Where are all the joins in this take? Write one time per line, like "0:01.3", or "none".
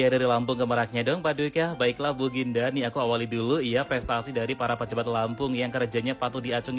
none